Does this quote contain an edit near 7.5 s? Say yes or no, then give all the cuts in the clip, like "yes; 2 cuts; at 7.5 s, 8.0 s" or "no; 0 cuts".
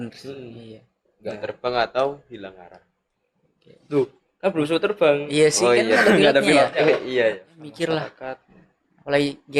yes; 1 cut; at 7.5 s